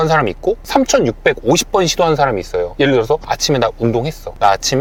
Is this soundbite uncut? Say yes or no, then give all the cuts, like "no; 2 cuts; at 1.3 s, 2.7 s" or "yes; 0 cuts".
yes; 0 cuts